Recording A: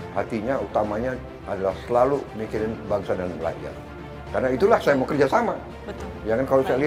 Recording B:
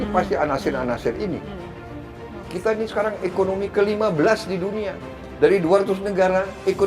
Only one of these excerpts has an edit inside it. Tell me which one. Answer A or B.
B